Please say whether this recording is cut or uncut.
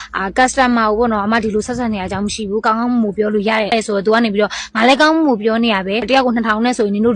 cut